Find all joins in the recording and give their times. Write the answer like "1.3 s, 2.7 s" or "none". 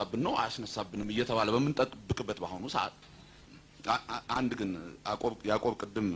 3.3 s